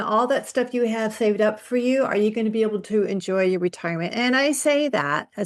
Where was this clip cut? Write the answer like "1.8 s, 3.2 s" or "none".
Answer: none